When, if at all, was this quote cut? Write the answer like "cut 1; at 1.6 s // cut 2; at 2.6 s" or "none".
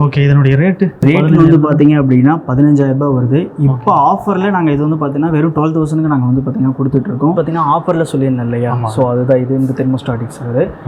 cut 1; at 1.0 s // cut 2; at 7.3 s